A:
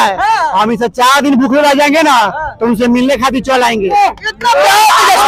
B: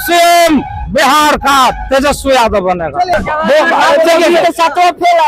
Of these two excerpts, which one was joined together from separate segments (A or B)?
B